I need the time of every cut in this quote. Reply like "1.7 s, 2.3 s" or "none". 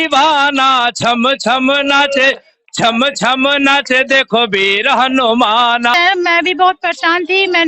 5.9 s